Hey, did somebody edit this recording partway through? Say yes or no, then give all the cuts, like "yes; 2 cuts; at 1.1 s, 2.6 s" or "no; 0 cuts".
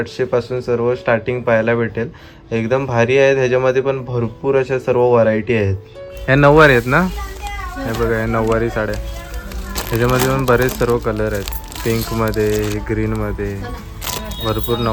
no; 0 cuts